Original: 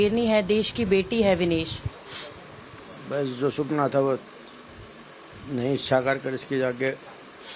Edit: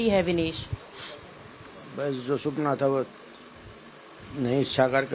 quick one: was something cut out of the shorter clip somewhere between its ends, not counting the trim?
no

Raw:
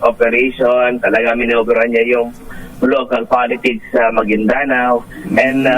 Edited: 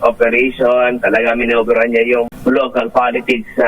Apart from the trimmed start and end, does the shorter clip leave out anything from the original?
yes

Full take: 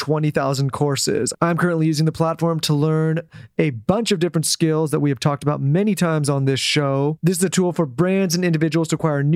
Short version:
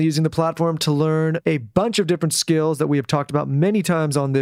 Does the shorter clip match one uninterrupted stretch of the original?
no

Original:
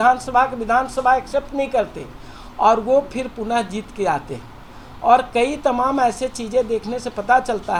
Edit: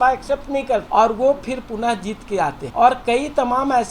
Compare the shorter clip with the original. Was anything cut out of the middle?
yes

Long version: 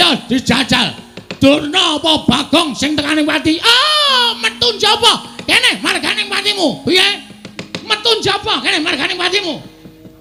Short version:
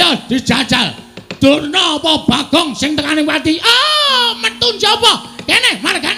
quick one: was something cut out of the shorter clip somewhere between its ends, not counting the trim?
no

